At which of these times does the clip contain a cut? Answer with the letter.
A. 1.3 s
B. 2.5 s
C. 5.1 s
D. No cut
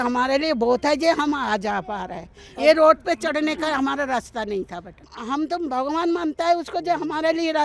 C